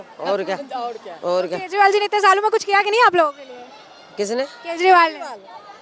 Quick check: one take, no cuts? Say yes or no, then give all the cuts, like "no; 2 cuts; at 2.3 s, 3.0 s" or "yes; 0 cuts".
yes; 0 cuts